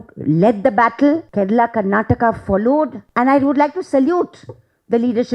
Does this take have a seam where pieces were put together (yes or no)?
yes